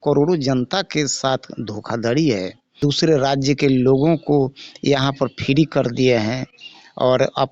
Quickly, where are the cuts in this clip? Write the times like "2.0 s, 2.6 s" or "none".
2.7 s